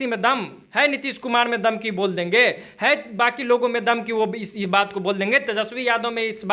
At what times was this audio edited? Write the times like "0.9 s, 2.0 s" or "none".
none